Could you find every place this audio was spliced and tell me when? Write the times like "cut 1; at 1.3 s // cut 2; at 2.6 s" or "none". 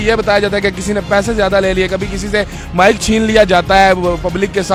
none